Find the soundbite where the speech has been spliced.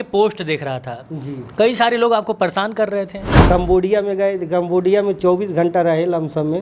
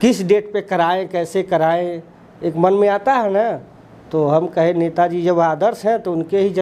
first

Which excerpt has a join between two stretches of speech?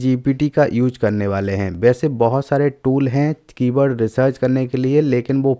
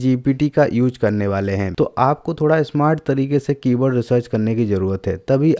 second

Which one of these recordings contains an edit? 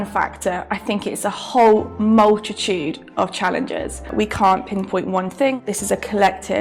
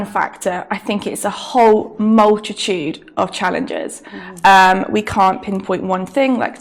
first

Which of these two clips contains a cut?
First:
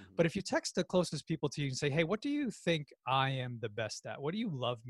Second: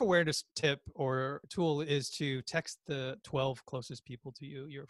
second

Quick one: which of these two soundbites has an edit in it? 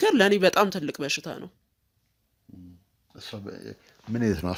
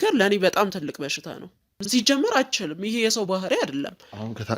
second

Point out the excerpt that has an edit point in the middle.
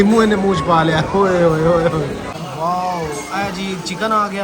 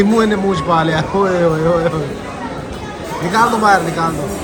first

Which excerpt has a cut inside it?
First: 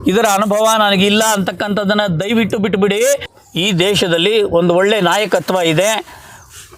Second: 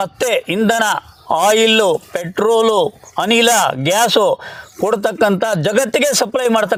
first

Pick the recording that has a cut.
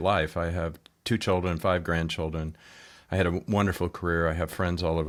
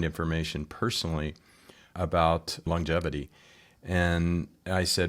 second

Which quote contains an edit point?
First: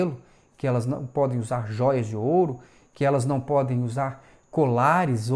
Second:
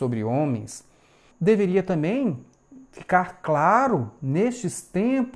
second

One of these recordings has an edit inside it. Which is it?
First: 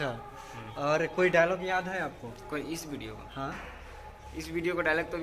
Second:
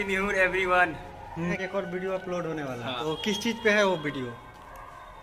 second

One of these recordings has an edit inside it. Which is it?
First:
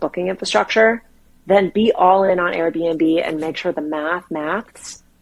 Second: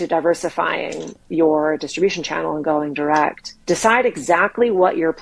second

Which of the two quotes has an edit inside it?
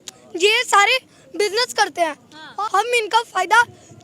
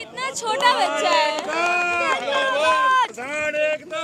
first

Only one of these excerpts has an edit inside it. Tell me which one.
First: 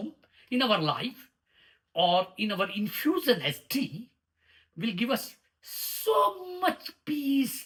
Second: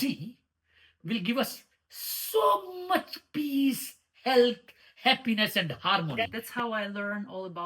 second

